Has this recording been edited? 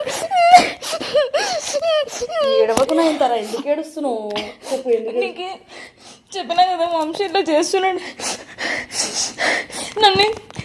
no; 0 cuts

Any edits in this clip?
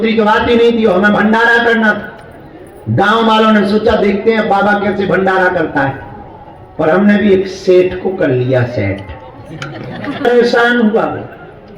yes; 1 cut; at 10.2 s

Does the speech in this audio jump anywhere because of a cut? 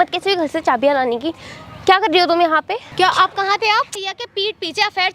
yes; 2 cuts; at 2.8 s, 4.1 s

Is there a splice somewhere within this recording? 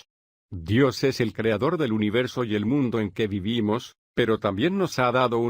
yes; 1 cut; at 2.5 s

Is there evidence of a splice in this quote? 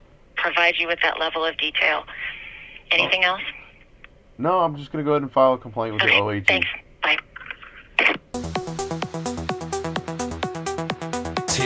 yes; 1 cut; at 8.5 s

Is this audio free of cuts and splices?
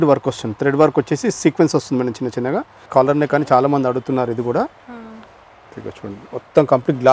no; 1 cut; at 2.8 s

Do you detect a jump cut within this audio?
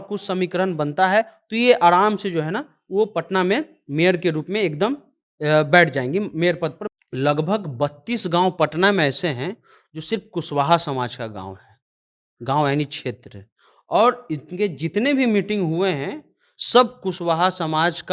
yes; 1 cut; at 6.8 s

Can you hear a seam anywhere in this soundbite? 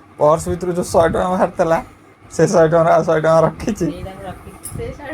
no; 0 cuts

